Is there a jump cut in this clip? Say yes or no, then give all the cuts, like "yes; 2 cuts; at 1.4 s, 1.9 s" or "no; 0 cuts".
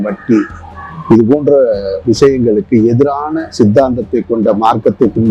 no; 0 cuts